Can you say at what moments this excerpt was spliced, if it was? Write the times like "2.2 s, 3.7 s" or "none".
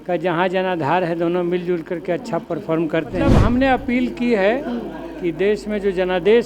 3.4 s